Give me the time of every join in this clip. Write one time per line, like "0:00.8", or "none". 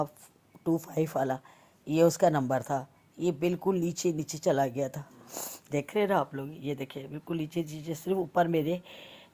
none